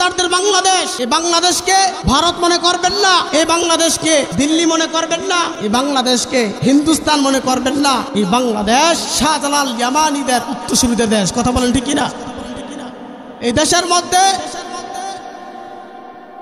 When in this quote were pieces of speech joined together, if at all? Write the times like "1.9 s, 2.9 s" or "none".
0.9 s, 2.0 s, 3.3 s, 4.3 s, 5.5 s, 6.6 s, 8.1 s, 9.1 s

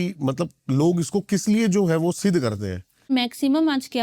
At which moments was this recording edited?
3.1 s

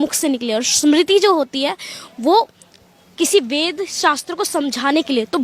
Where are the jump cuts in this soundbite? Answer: none

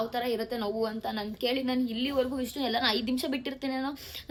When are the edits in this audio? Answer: none

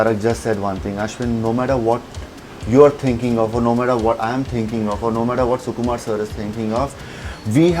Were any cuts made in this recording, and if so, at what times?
none

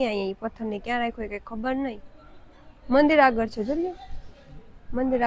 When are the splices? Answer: none

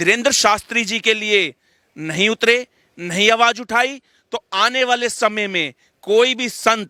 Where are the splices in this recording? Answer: none

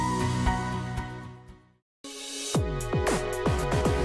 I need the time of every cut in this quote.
1.9 s

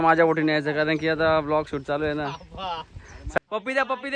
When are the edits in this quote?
3.2 s

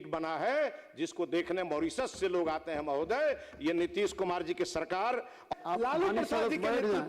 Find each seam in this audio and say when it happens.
5.5 s

